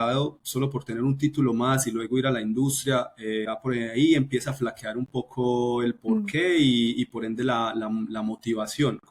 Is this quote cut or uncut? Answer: cut